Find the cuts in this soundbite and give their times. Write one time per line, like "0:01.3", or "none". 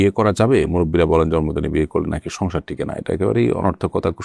none